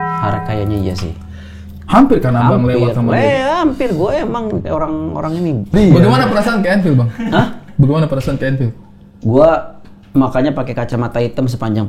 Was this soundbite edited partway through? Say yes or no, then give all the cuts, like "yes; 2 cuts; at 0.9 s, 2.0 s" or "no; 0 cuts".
yes; 1 cut; at 5.7 s